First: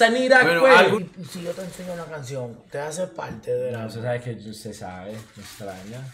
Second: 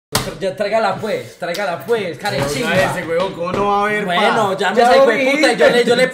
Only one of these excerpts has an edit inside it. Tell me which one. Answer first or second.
first